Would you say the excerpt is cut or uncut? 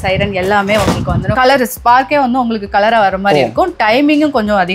cut